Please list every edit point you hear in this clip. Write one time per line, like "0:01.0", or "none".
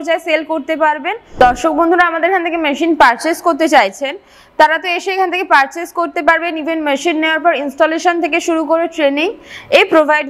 0:01.4